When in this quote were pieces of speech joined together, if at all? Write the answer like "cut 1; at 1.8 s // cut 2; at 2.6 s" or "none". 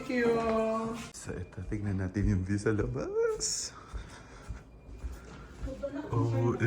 cut 1; at 1.1 s